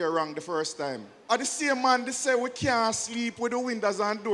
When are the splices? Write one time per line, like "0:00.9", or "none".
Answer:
0:01.2